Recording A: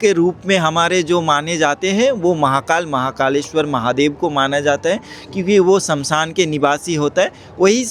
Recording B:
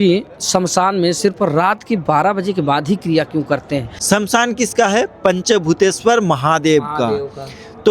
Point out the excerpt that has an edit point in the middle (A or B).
B